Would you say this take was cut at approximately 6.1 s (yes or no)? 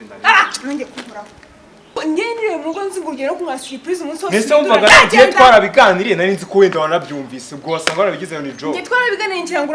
no